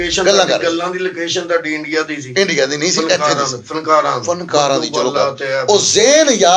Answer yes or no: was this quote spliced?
no